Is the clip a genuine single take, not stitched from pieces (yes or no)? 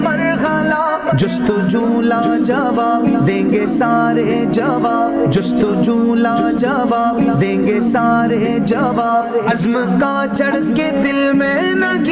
yes